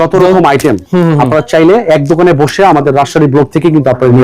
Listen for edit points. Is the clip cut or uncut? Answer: uncut